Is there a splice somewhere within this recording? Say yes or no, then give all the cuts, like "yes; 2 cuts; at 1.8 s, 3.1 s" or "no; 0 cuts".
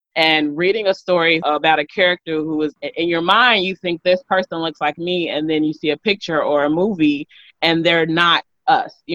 yes; 2 cuts; at 1.4 s, 2.8 s